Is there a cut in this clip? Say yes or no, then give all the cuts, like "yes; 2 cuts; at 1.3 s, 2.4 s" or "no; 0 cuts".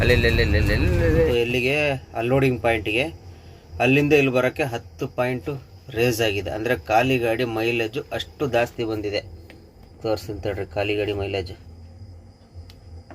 yes; 1 cut; at 1.3 s